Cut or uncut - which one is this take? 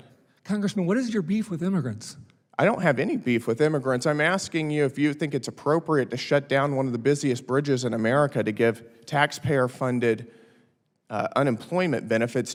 uncut